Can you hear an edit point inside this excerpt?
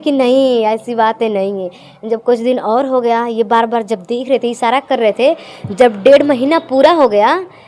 no; 0 cuts

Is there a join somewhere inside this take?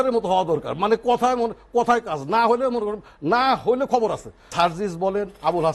yes; 1 cut; at 4.4 s

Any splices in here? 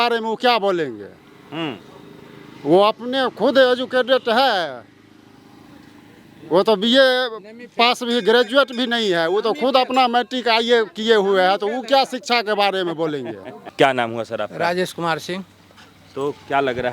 no; 0 cuts

